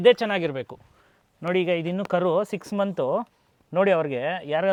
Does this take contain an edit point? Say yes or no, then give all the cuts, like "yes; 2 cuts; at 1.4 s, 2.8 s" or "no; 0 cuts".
no; 0 cuts